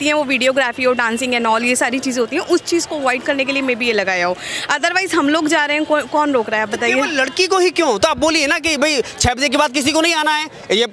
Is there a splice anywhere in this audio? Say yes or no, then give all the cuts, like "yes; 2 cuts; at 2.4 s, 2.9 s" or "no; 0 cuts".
no; 0 cuts